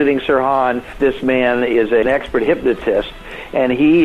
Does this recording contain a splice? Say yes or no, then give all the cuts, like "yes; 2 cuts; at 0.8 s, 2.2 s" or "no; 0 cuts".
yes; 2 cuts; at 0.9 s, 2.0 s